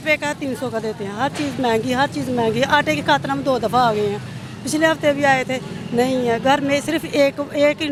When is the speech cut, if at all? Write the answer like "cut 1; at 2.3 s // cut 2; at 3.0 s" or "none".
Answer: none